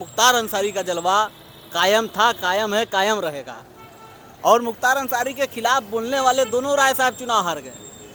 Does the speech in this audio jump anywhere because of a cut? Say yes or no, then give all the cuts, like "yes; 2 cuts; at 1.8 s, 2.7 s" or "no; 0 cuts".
no; 0 cuts